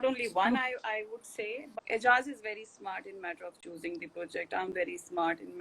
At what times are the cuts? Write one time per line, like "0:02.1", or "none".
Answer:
0:01.6